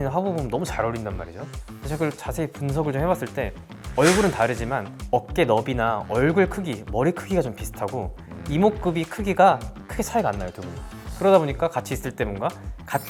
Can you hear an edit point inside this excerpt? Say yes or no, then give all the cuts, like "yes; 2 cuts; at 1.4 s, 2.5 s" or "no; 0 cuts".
no; 0 cuts